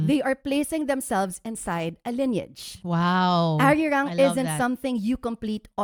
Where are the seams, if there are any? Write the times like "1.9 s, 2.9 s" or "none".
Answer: none